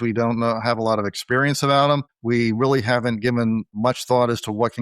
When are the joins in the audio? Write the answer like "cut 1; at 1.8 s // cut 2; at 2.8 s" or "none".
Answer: cut 1; at 2.1 s // cut 2; at 3.7 s